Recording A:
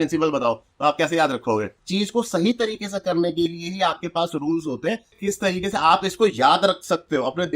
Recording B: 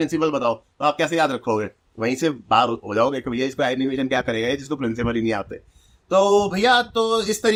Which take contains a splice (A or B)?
A